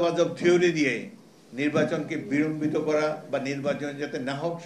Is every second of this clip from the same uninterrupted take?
yes; 0 cuts

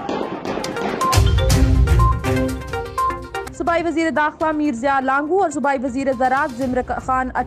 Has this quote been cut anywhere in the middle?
yes; 2 cuts; at 1.0 s, 3.5 s

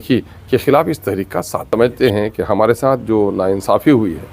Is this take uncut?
no; 1 cut; at 1.7 s

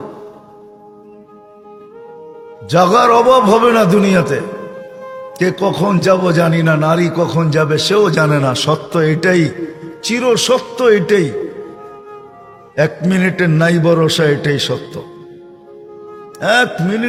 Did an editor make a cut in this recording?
no; 0 cuts

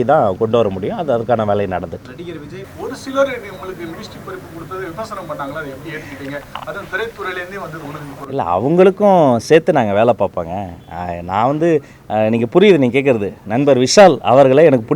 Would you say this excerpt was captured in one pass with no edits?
no; 1 cut; at 2.7 s

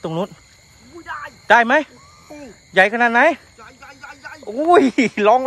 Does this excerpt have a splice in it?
no; 0 cuts

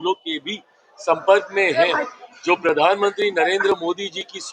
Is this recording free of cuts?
yes; 0 cuts

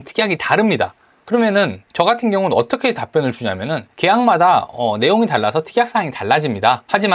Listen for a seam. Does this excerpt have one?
yes; 1 cut; at 3.8 s

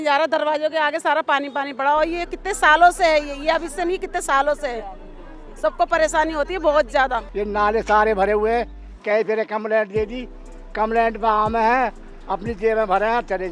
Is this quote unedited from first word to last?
yes; 0 cuts

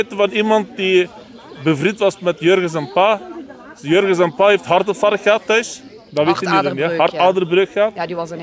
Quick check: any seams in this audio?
no; 0 cuts

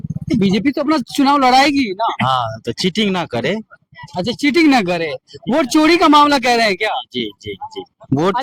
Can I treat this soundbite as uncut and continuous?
yes; 0 cuts

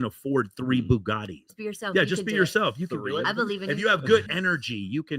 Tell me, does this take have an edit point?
yes; 2 cuts; at 1.4 s, 4.3 s

